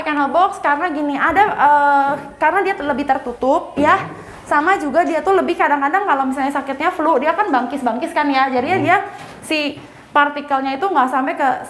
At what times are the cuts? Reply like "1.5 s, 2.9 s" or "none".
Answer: none